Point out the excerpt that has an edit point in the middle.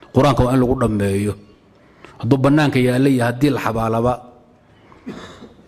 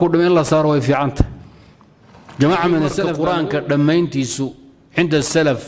second; 1 cut; at 3.2 s

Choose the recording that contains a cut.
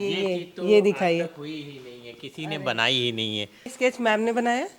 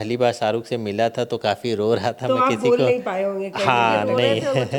first; 1 cut; at 3.7 s

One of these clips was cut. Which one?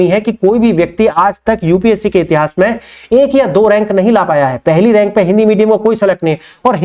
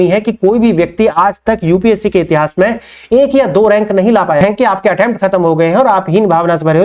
second; 1 cut; at 4.4 s

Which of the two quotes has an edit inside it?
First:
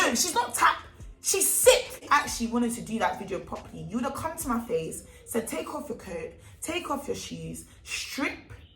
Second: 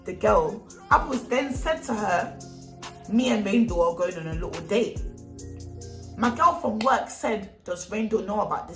first; 1 cut; at 2.0 s

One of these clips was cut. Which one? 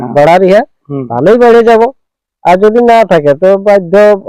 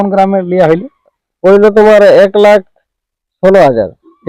second; 1 cut; at 1.2 s

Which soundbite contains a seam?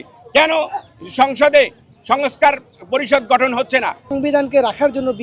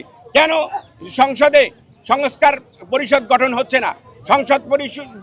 first; 1 cut; at 4.1 s

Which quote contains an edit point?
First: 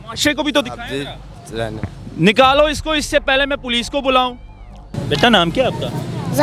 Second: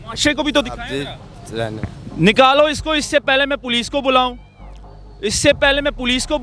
first; 1 cut; at 4.9 s

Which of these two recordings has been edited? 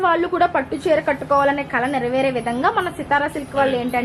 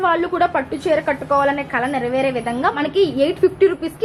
second; 1 cut; at 2.8 s

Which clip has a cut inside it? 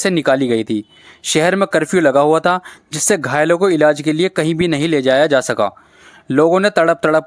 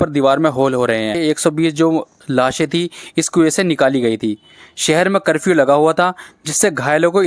second; 1 cut; at 1.2 s

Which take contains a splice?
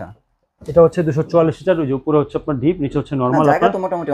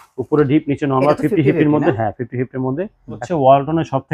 second; 1 cut; at 3.2 s

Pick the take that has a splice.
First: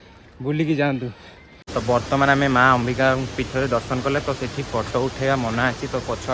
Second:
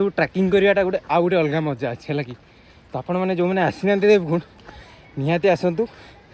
first; 1 cut; at 1.6 s

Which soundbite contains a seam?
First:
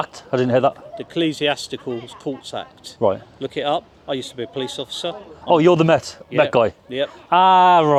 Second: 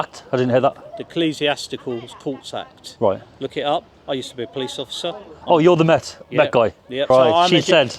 second; 1 cut; at 7.0 s

